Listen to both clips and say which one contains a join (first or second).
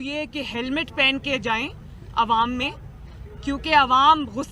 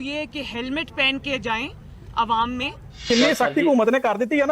second